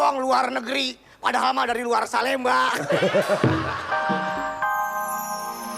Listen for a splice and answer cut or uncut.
cut